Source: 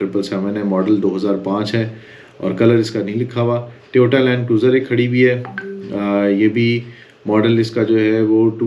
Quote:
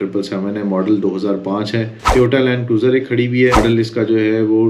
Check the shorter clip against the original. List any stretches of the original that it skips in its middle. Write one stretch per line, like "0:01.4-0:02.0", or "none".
0:02.0-0:03.8
0:05.4-0:07.4